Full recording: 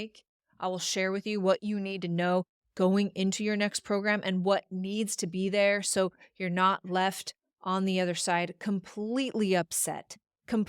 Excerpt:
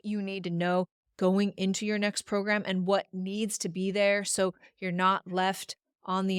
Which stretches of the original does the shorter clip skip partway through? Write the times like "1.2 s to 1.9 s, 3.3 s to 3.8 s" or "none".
none